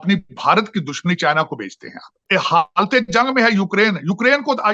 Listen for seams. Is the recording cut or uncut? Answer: cut